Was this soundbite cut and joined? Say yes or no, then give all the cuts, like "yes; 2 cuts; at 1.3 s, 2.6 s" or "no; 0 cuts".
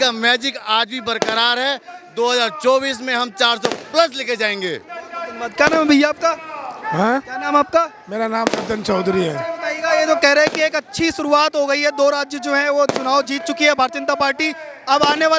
no; 0 cuts